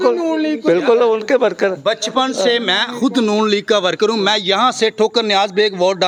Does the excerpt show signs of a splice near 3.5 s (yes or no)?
no